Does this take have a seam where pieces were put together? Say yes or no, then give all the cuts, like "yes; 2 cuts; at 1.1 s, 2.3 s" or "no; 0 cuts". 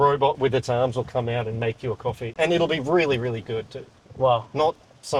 no; 0 cuts